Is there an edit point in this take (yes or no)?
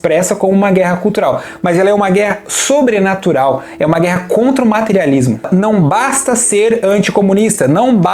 yes